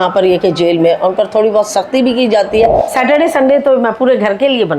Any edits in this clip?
yes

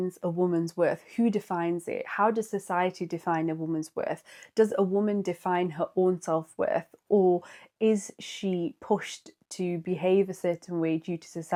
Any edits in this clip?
no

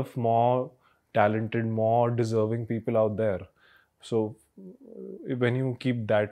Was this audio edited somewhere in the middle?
no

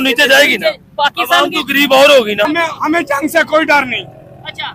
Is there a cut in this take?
yes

